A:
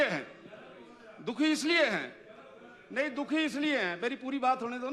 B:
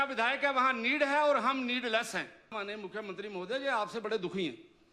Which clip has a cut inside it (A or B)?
B